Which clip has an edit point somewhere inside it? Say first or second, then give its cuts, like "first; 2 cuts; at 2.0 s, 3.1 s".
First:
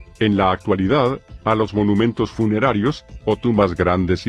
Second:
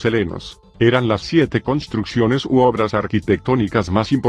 first; 1 cut; at 1.1 s